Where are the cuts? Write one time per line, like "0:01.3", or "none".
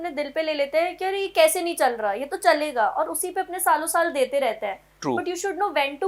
none